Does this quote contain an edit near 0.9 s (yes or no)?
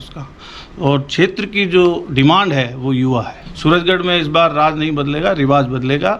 no